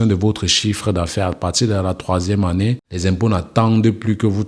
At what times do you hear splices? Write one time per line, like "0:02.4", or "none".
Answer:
0:02.9